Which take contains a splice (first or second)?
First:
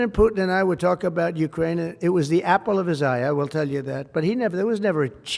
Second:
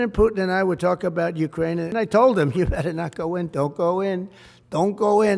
second